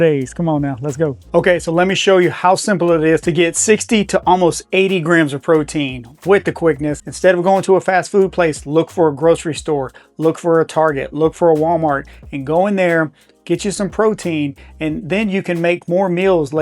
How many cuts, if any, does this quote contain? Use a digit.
2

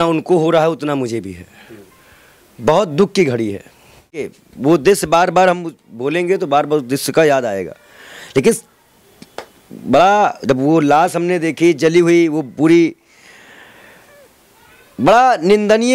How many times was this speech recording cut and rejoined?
1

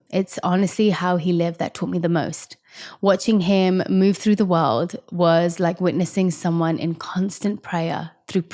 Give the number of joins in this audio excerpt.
0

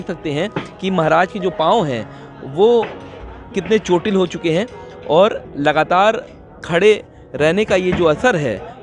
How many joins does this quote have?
0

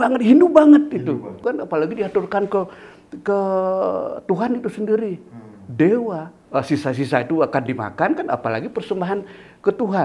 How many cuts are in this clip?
2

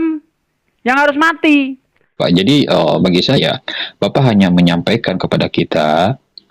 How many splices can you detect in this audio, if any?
1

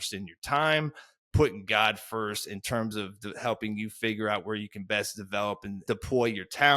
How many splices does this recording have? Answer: 1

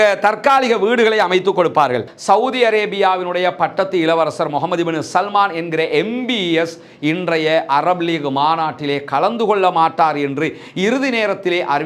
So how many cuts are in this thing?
1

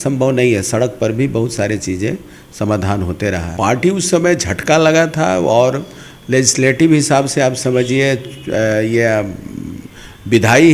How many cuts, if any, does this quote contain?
1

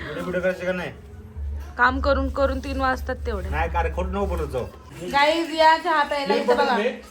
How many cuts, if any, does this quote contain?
1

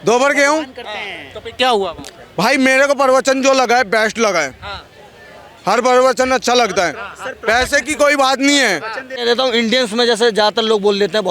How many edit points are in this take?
1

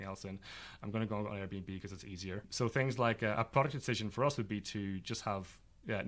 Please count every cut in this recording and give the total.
1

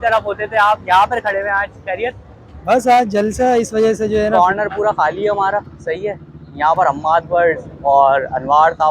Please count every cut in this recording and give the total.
1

